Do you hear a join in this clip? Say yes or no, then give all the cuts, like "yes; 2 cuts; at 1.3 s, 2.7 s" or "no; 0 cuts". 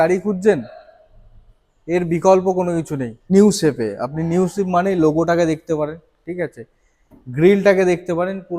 yes; 1 cut; at 3.2 s